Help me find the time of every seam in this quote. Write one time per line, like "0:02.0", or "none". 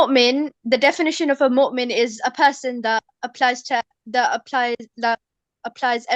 none